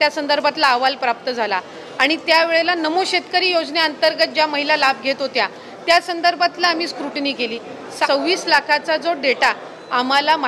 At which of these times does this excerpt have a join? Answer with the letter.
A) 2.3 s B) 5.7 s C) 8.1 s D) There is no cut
C